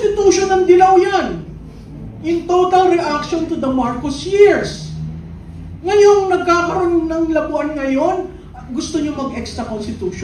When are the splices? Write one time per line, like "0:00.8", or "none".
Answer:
none